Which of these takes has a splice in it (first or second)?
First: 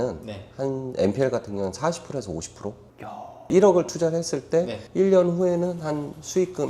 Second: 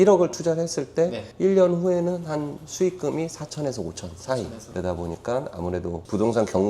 second